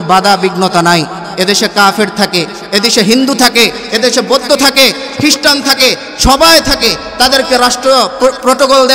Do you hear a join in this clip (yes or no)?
no